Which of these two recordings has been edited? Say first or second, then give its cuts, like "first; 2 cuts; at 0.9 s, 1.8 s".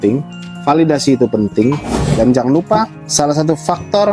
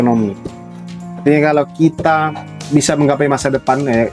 first; 1 cut; at 2.0 s